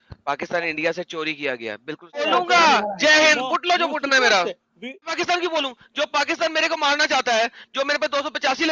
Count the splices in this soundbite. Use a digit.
2